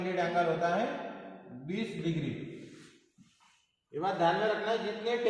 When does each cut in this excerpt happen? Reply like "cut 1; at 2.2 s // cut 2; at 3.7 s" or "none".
none